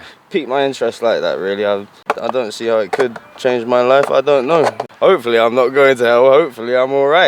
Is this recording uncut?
no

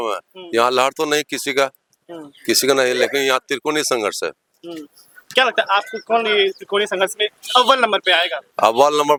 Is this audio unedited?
yes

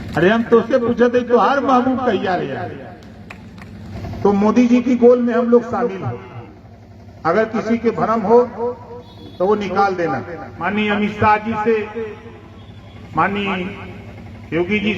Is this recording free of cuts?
no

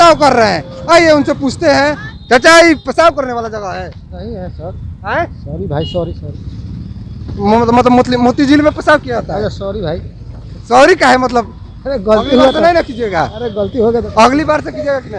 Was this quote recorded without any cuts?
no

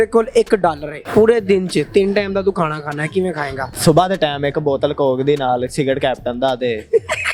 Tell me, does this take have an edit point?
yes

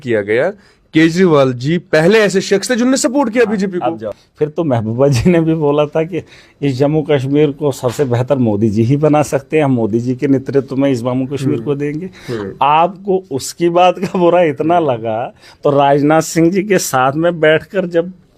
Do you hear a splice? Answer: no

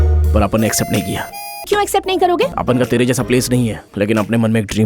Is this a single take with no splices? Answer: no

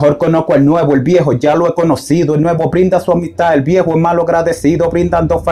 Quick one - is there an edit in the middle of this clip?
no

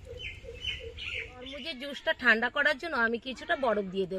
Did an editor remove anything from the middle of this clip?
yes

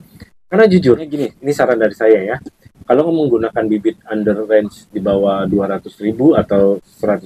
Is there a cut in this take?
yes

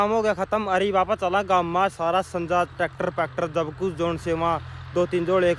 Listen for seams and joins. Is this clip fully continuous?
yes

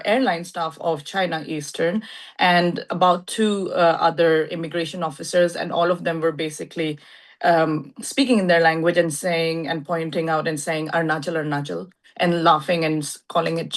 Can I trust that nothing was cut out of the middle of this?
yes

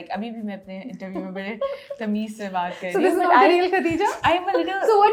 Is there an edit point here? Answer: no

